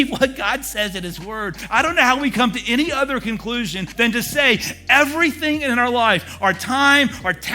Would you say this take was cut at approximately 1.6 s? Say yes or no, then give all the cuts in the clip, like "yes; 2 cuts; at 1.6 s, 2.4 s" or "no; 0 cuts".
yes; 2 cuts; at 1.6 s, 3.8 s